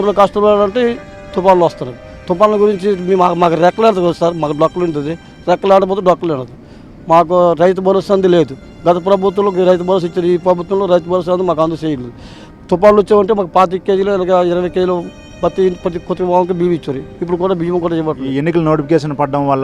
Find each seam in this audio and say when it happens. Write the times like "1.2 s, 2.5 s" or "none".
18.3 s